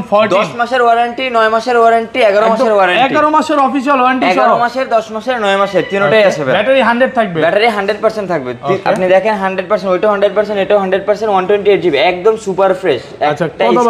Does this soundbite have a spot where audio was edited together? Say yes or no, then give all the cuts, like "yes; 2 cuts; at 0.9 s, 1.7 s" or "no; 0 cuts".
no; 0 cuts